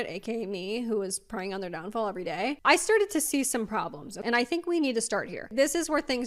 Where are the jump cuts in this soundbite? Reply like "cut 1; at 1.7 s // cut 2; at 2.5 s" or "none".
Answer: cut 1; at 2.6 s // cut 2; at 4.1 s